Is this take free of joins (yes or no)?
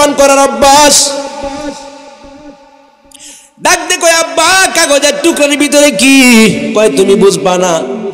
yes